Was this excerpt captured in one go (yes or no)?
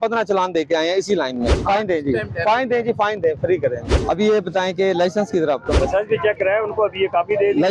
no